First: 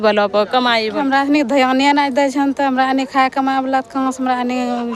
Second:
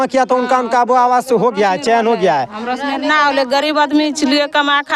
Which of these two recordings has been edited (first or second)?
first